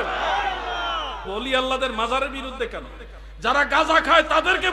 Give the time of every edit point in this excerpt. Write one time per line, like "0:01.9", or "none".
0:01.2